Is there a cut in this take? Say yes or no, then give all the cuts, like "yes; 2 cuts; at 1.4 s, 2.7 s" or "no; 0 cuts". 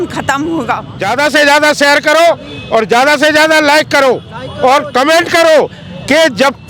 yes; 1 cut; at 0.9 s